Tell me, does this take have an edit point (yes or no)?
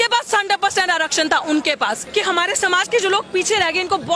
yes